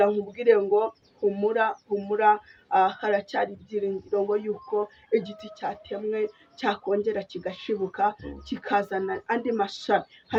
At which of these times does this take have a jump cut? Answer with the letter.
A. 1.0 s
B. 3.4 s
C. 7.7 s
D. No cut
D